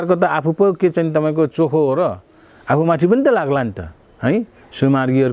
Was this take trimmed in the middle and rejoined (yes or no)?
no